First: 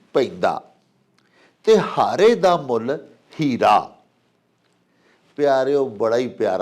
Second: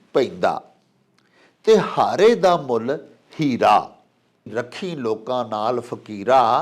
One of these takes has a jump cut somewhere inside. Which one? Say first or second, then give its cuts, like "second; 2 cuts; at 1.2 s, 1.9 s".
second; 1 cut; at 4.5 s